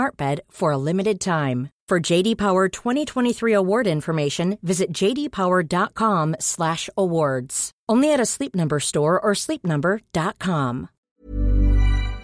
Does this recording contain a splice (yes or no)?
yes